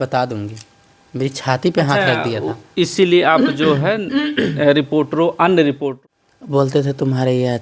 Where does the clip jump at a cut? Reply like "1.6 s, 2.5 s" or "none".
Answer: 5.9 s